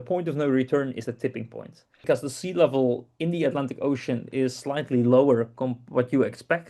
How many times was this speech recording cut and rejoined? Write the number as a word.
one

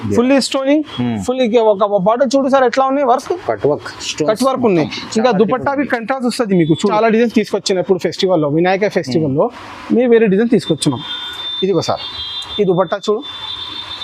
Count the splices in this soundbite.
one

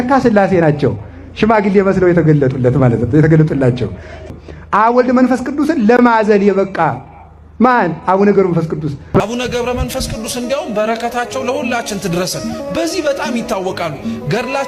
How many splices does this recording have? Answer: two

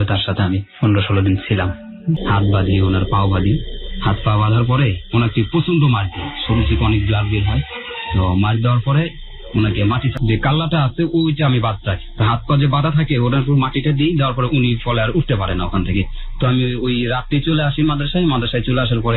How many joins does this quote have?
one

